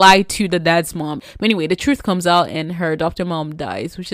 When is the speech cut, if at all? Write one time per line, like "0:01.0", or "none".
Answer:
0:01.2